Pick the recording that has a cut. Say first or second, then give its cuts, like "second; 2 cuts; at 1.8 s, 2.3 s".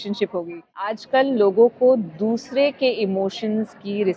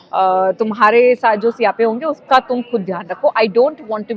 first; 1 cut; at 1.0 s